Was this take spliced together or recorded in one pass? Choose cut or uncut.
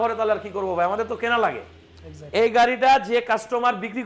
uncut